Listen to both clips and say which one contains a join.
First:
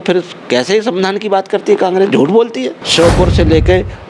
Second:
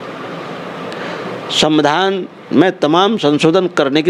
first; 1 cut; at 2.8 s

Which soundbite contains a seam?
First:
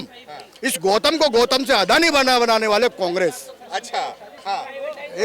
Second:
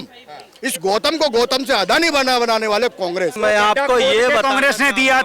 second; 1 cut; at 3.4 s

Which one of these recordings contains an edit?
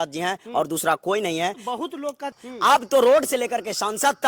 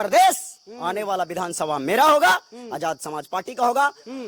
first; 1 cut; at 2.4 s

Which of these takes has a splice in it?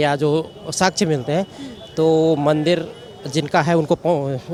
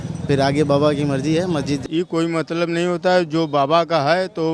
second; 1 cut; at 1.8 s

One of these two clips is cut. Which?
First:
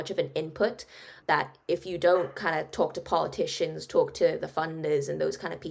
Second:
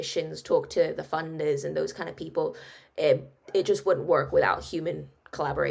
first; 1 cut; at 1.1 s

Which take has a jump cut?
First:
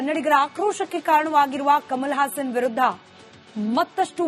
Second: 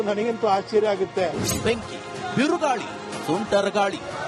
second; 1 cut; at 0.9 s

